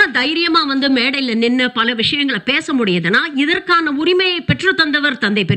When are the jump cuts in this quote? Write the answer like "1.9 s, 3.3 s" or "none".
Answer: none